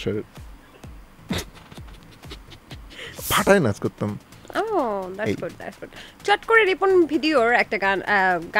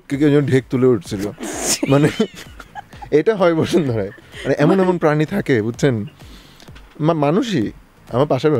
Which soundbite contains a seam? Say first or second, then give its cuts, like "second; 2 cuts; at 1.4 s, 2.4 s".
first; 1 cut; at 3.2 s